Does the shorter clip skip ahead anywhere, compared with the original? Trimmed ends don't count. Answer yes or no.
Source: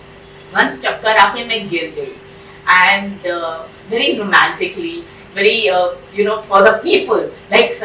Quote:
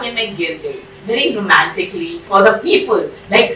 yes